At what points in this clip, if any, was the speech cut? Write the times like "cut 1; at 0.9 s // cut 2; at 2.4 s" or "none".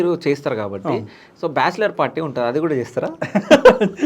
none